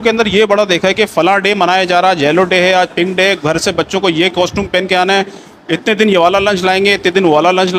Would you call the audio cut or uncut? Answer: uncut